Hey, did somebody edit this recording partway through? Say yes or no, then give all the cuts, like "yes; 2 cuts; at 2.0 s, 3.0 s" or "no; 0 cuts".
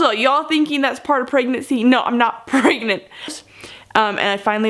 yes; 1 cut; at 3.4 s